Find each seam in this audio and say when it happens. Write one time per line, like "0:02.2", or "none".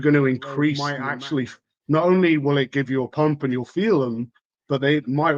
0:00.9